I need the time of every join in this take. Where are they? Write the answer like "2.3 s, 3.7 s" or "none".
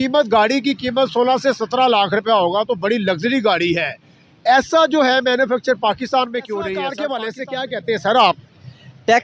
6.8 s